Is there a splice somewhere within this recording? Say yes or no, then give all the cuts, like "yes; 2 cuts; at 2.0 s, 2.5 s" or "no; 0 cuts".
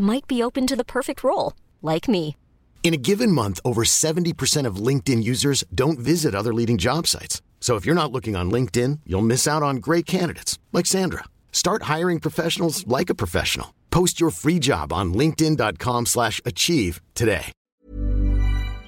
yes; 1 cut; at 17.6 s